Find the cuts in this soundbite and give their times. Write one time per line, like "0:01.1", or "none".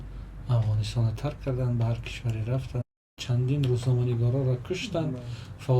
0:03.2